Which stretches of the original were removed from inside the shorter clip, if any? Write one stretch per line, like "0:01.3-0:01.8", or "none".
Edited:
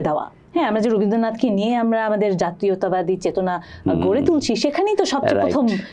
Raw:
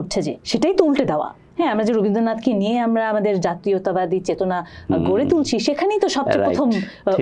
none